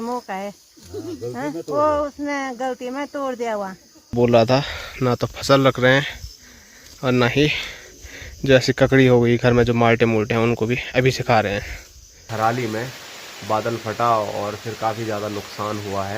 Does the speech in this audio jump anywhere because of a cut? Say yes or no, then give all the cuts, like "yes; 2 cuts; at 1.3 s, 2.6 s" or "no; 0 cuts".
yes; 2 cuts; at 4.1 s, 12.2 s